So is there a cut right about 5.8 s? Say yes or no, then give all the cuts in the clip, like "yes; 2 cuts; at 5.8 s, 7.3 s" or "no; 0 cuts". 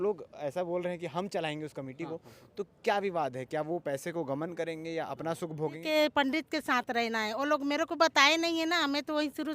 yes; 1 cut; at 5.8 s